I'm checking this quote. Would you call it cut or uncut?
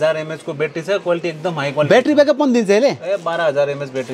uncut